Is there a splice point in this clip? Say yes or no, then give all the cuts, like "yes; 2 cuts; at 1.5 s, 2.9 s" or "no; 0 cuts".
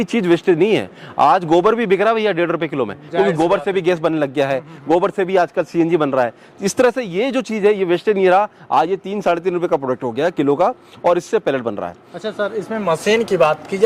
no; 0 cuts